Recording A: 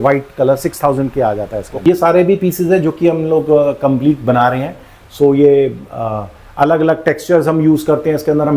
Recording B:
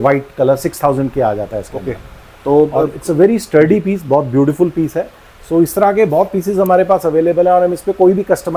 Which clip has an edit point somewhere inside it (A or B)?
A